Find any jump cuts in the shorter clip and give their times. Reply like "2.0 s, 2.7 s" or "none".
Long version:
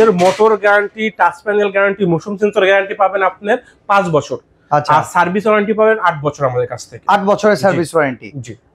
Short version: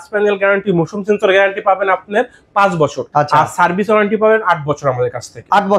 3.0 s